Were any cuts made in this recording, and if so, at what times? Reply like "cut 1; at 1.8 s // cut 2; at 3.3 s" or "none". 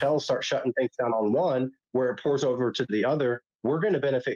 none